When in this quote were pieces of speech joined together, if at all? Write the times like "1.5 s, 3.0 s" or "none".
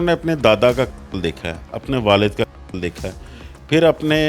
none